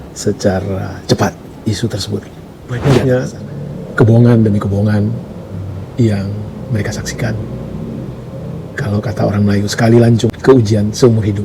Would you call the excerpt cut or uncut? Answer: cut